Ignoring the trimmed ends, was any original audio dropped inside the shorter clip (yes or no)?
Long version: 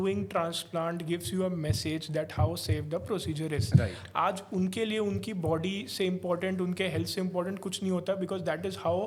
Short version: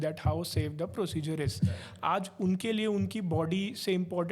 no